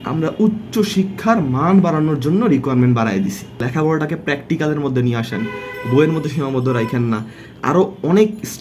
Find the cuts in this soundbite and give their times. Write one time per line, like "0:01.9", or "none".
none